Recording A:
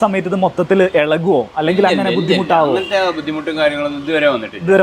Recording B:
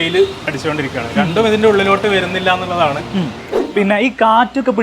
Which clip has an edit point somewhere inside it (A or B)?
B